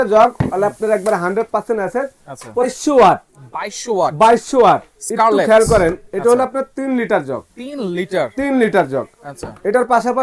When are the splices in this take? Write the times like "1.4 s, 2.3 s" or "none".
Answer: 2.8 s